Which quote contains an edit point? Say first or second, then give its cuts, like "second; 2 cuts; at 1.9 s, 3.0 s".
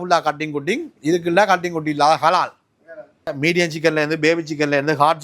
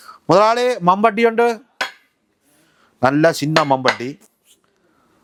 first; 1 cut; at 3.3 s